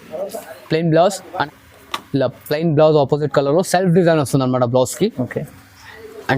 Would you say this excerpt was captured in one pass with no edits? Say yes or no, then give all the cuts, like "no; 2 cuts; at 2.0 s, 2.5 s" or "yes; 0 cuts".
no; 1 cut; at 1.5 s